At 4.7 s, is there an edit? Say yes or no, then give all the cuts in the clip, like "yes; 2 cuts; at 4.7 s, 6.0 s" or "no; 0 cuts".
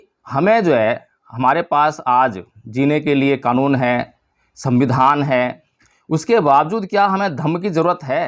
no; 0 cuts